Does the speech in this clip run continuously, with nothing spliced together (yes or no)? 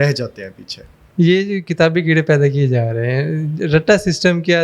yes